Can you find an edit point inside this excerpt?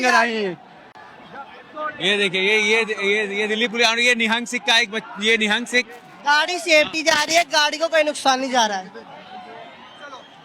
no; 0 cuts

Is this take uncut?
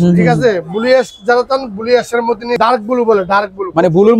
no; 1 cut; at 2.6 s

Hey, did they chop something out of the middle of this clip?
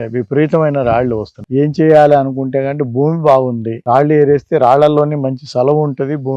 no; 0 cuts

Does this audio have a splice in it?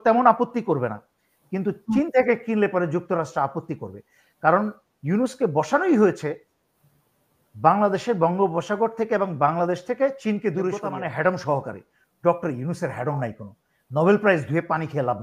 yes; 1 cut; at 10.9 s

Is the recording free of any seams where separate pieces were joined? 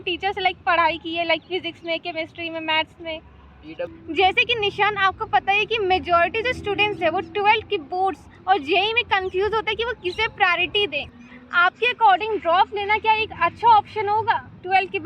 no; 2 cuts; at 4.0 s, 11.1 s

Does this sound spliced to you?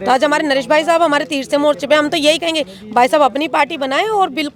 no; 0 cuts

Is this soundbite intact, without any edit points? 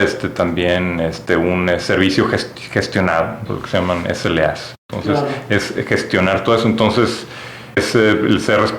no; 2 cuts; at 3.4 s, 7.8 s

